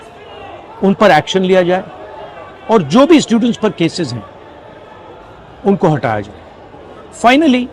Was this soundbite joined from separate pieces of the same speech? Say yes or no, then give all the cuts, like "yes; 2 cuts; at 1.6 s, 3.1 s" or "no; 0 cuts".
no; 0 cuts